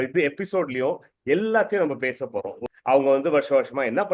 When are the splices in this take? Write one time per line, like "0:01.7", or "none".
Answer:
0:02.6